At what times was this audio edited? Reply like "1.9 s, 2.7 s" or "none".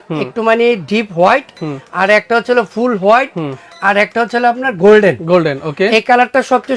none